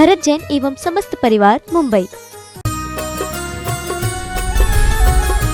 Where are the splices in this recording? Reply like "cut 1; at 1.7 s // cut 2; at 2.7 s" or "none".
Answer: cut 1; at 2.4 s